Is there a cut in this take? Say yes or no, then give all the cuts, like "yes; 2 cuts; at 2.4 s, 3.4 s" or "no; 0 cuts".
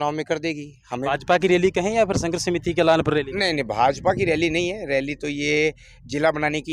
yes; 1 cut; at 1.0 s